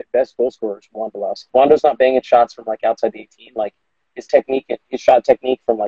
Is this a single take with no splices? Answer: no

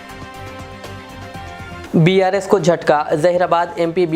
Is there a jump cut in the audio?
yes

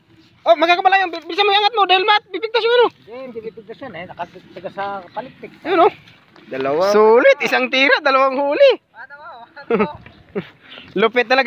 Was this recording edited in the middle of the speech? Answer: no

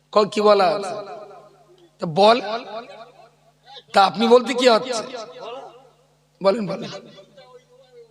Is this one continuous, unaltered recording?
yes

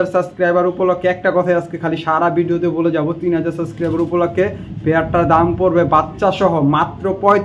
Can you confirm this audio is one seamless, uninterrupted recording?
yes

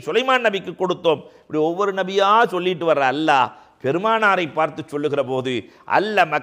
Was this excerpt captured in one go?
yes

